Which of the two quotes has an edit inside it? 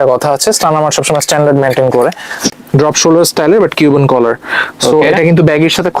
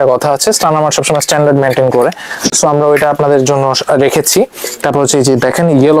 first; 1 cut; at 2.5 s

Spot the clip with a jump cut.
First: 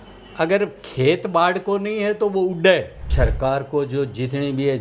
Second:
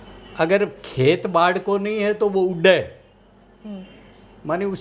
first; 1 cut; at 3.1 s

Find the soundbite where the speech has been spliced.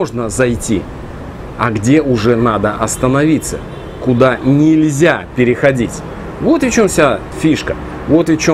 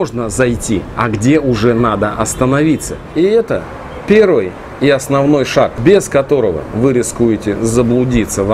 second; 2 cuts; at 0.9 s, 3.0 s

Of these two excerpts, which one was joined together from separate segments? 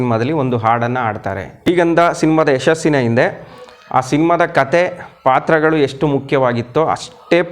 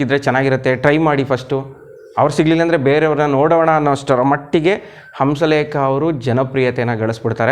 first; 1 cut; at 1.7 s

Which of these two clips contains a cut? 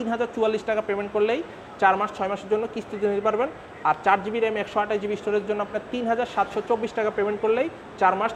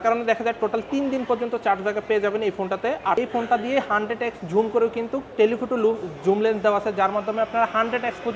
second; 1 cut; at 3.2 s

